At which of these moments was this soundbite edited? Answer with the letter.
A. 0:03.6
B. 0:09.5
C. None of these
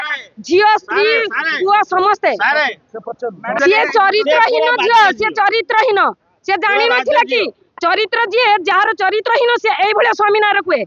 A